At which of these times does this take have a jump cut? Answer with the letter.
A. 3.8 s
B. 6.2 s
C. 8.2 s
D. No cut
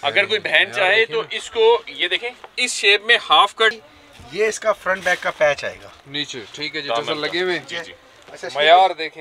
A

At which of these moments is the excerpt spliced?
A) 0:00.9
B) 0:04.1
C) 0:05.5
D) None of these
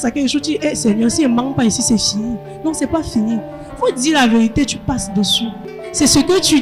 C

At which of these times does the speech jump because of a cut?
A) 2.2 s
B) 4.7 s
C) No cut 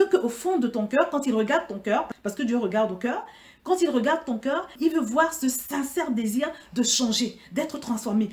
B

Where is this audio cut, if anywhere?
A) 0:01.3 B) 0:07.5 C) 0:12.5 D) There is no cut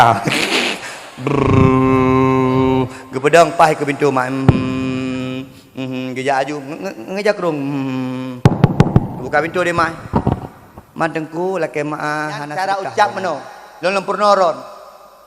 C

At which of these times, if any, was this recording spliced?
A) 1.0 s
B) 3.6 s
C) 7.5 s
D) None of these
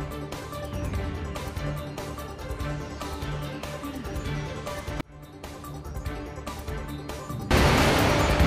C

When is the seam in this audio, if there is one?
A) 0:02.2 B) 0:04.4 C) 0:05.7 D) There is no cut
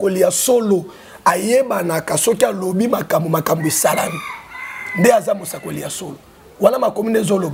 D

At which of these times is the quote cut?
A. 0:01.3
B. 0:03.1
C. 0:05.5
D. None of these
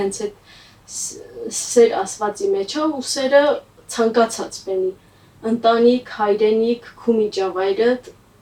D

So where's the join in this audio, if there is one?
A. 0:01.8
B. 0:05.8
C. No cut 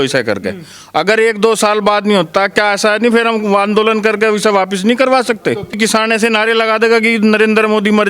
B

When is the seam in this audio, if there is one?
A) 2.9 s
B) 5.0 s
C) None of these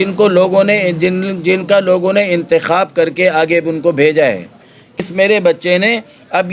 B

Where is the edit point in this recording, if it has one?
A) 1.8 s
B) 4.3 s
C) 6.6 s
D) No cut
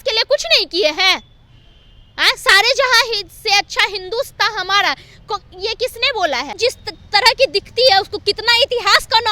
C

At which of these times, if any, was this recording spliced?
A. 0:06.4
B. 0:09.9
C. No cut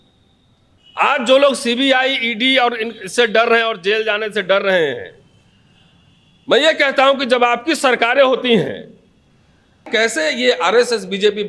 B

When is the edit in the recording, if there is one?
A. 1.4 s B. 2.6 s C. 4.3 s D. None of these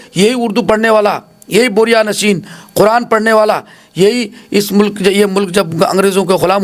D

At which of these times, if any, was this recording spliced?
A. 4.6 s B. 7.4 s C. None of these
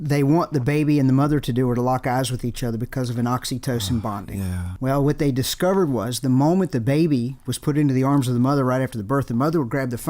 A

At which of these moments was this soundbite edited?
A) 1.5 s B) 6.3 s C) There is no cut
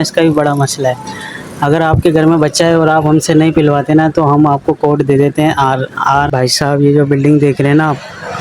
B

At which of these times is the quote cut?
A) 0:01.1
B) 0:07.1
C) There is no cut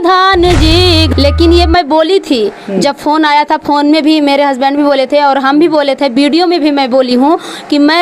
A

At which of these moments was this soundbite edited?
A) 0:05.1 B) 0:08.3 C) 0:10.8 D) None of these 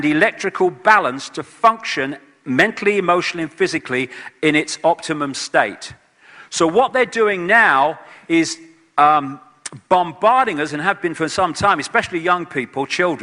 A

